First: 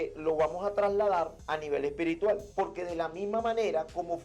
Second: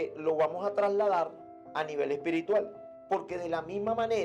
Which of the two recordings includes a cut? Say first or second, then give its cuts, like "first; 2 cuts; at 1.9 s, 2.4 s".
first; 2 cuts; at 1.4 s, 2.5 s